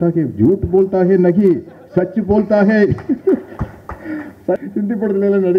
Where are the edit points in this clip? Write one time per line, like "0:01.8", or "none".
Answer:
0:04.6